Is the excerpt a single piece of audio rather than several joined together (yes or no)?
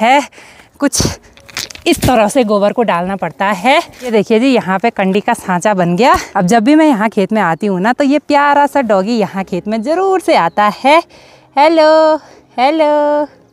yes